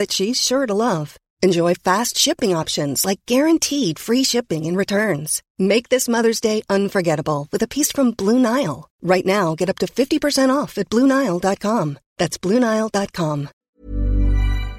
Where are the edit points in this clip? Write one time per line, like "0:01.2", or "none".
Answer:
0:13.5